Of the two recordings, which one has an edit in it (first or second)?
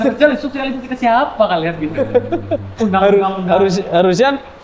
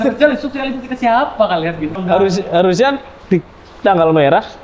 second